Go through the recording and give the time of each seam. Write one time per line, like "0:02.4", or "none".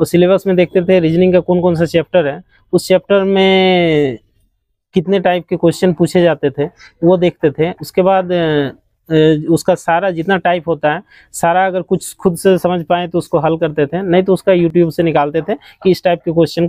none